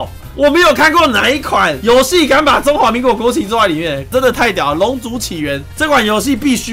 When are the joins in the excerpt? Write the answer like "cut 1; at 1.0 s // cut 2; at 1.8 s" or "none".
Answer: cut 1; at 5.7 s